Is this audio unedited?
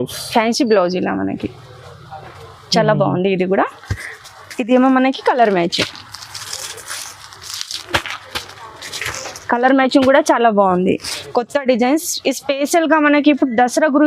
no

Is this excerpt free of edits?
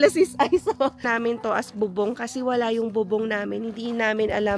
no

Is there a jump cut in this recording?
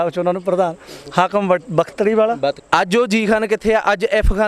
yes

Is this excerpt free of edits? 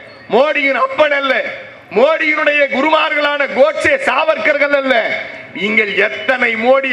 yes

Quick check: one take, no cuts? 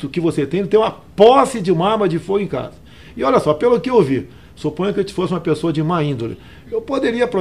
yes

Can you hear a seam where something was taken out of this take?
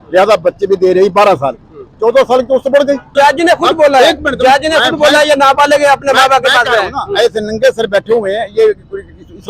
yes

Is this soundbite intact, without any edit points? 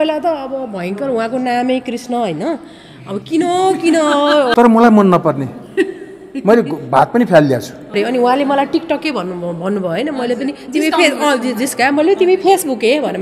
no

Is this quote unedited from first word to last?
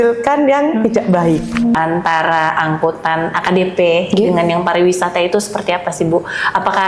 no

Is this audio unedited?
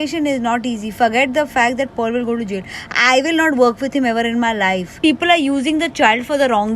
no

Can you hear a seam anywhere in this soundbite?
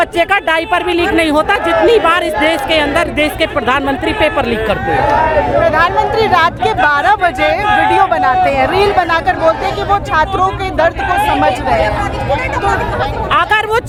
no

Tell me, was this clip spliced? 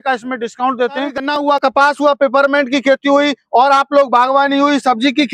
yes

